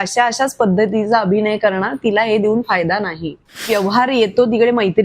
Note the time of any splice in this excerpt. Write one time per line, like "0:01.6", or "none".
0:03.7

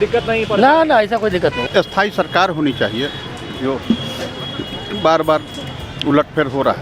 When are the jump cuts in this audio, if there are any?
0:01.6

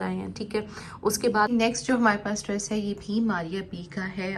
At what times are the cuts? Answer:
0:01.5

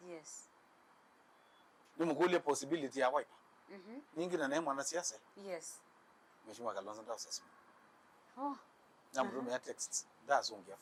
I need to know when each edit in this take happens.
none

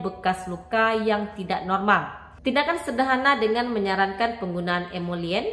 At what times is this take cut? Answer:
0:02.2

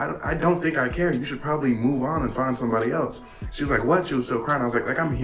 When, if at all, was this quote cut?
none

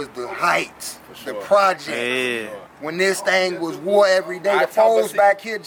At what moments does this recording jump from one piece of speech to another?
none

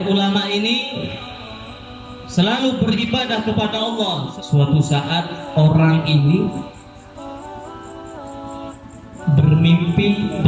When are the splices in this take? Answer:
0:04.3

